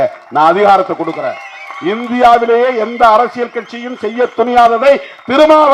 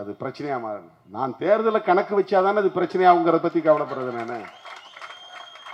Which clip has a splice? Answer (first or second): second